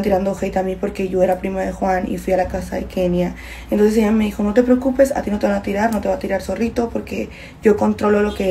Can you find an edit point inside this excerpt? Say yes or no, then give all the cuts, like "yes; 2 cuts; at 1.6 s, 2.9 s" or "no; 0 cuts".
no; 0 cuts